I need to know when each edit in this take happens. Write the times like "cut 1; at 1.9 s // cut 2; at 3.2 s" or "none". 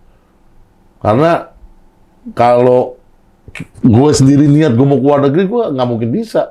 none